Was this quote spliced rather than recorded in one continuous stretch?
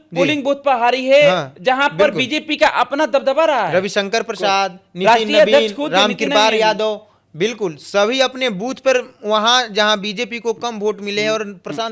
no; 0 cuts

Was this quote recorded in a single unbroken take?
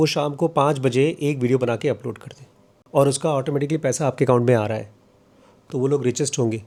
yes; 0 cuts

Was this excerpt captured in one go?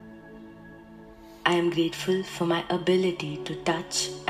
no; 1 cut; at 1.4 s

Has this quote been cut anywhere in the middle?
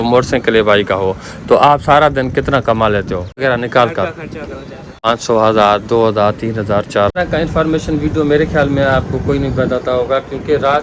yes; 3 cuts; at 3.4 s, 5.1 s, 7.2 s

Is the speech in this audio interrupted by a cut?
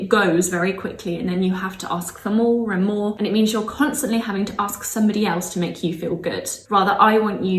yes; 2 cuts; at 3.1 s, 6.5 s

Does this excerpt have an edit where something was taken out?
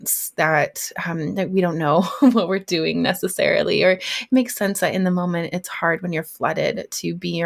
no; 0 cuts

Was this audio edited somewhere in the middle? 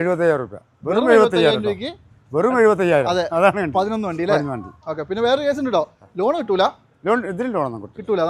no; 0 cuts

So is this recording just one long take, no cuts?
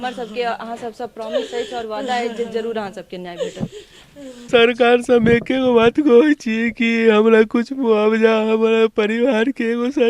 no; 1 cut; at 4.3 s

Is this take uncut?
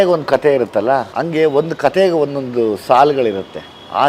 no; 1 cut; at 1.1 s

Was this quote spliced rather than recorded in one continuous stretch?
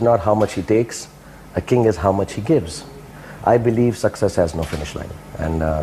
no; 0 cuts

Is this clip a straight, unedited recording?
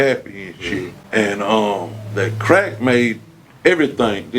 no; 1 cut; at 1.0 s

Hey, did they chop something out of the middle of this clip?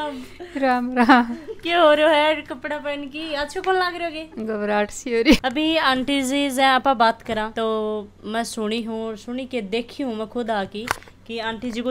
no; 0 cuts

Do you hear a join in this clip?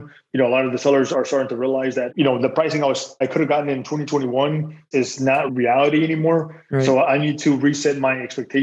yes; 1 cut; at 2.1 s

